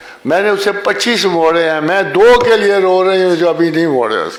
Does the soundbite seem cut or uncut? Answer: uncut